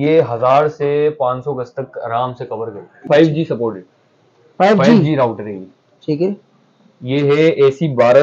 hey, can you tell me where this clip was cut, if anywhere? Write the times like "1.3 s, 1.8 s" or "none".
2.9 s